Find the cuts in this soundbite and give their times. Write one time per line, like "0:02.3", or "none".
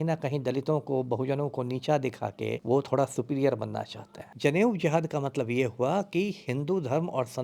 0:02.6
0:04.3